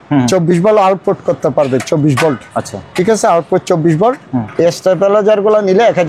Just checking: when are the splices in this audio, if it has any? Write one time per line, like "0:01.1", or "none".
none